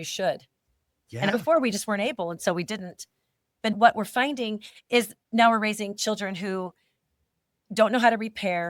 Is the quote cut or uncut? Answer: cut